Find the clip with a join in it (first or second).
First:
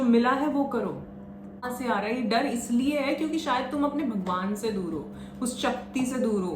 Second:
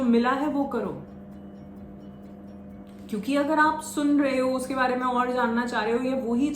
first